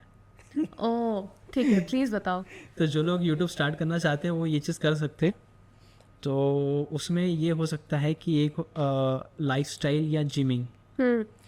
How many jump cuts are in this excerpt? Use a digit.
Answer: 0